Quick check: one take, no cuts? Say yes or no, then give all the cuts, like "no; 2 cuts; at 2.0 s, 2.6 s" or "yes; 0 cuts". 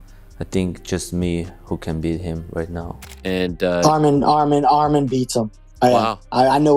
no; 1 cut; at 3.1 s